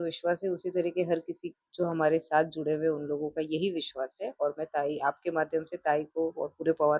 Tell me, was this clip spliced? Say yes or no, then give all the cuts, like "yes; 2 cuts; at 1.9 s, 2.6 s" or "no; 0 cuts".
no; 0 cuts